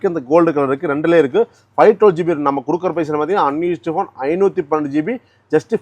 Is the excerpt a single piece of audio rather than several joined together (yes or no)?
yes